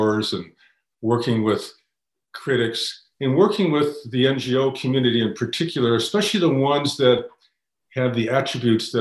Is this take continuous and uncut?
yes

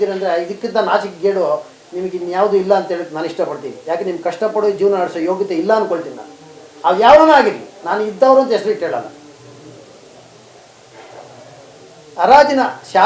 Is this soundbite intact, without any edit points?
yes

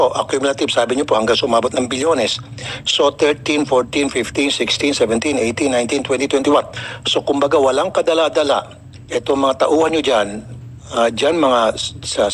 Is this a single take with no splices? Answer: yes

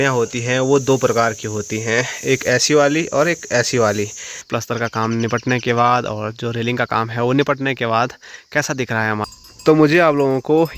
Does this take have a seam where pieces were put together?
yes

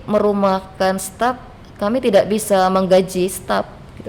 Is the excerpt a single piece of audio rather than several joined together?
yes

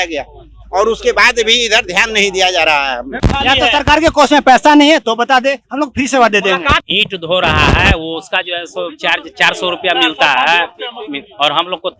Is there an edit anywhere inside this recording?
yes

